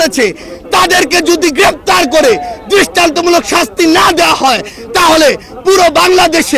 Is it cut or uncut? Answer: uncut